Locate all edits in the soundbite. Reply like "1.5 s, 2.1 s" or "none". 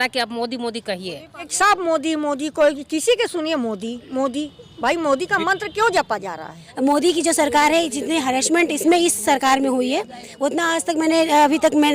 1.5 s, 6.6 s